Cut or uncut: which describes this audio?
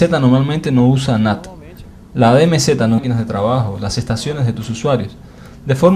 uncut